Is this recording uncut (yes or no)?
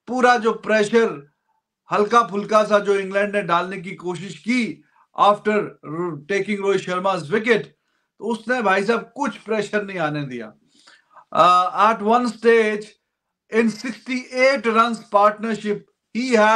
yes